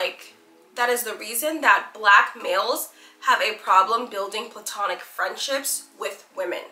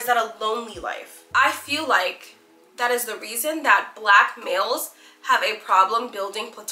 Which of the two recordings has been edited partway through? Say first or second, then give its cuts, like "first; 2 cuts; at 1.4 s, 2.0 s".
second; 1 cut; at 1.1 s